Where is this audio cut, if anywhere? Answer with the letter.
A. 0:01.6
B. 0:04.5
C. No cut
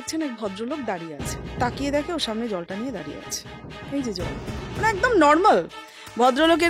A